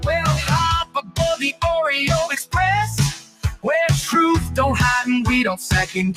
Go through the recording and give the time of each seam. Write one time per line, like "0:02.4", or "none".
none